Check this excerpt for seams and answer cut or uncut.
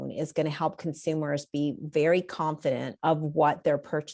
cut